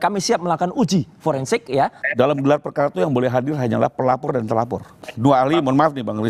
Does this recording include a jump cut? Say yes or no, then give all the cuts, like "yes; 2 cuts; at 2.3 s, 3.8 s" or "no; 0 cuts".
yes; 2 cuts; at 2.0 s, 5.0 s